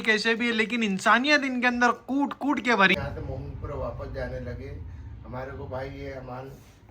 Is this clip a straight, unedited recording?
no; 1 cut; at 3.0 s

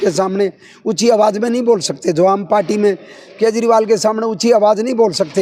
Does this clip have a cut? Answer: no; 0 cuts

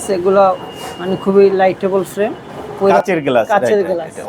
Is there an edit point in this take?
yes; 1 cut; at 3.0 s

